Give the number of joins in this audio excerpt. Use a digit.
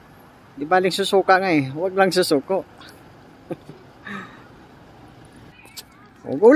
1